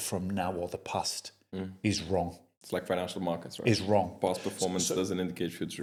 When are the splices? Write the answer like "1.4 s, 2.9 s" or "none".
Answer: none